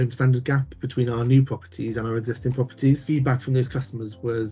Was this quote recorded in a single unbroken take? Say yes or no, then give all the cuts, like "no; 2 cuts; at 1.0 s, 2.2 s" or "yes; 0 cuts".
no; 1 cut; at 3.1 s